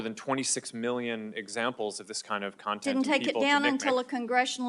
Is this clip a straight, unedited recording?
yes; 0 cuts

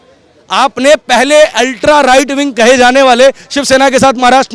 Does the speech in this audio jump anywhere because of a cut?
no; 0 cuts

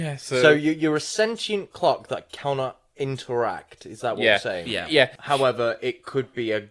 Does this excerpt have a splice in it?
yes; 1 cut; at 5.2 s

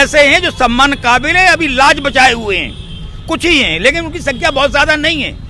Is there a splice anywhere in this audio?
no; 0 cuts

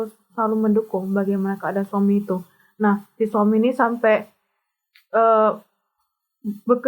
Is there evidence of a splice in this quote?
no; 0 cuts

